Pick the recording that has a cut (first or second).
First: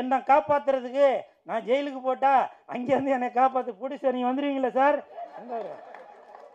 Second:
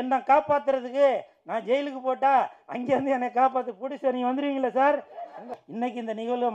second